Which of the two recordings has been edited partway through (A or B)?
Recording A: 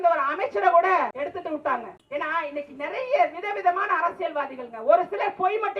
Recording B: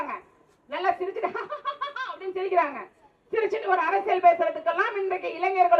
A